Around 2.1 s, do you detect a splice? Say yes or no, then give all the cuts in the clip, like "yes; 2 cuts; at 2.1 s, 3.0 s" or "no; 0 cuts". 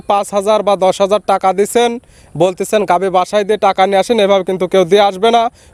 no; 0 cuts